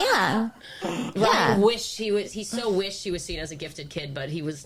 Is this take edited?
no; 0 cuts

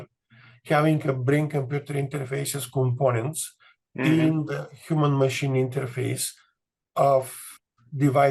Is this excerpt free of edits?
yes; 0 cuts

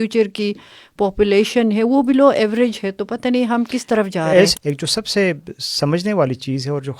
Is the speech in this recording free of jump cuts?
no; 1 cut; at 4.5 s

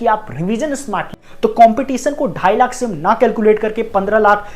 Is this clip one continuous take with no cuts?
no; 1 cut; at 1.1 s

